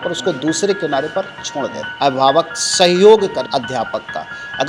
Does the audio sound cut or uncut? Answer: cut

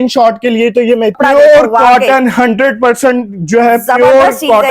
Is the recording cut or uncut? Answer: cut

